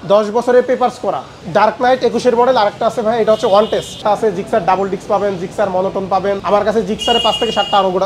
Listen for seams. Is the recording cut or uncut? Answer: cut